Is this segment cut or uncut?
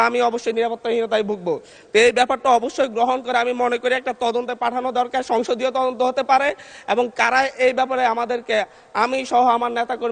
uncut